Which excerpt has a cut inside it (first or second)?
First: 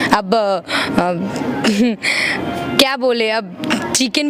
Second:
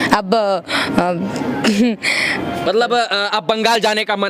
second